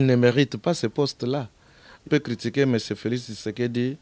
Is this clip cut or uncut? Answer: cut